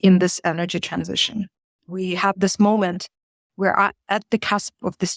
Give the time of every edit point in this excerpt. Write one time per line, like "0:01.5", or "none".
0:01.8